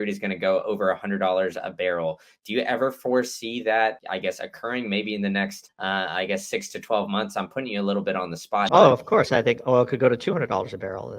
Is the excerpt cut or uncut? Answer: cut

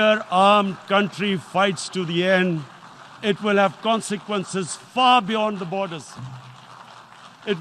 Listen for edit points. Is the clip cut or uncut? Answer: uncut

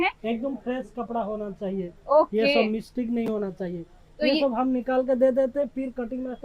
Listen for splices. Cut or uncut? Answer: uncut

